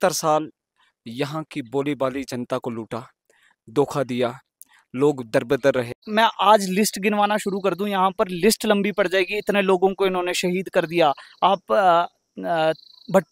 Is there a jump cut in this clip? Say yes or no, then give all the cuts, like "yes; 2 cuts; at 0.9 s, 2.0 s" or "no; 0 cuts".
yes; 1 cut; at 6.0 s